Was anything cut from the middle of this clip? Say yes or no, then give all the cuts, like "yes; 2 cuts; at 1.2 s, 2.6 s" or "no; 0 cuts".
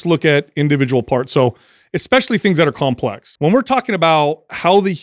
yes; 1 cut; at 3.2 s